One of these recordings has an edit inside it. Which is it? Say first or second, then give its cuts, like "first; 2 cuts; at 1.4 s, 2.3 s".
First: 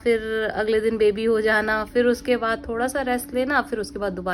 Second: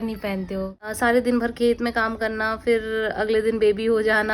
second; 1 cut; at 0.9 s